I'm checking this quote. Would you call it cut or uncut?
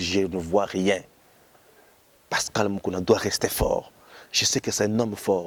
uncut